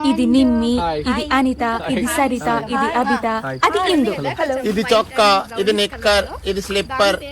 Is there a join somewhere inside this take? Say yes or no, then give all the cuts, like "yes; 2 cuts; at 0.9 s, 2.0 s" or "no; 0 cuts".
no; 0 cuts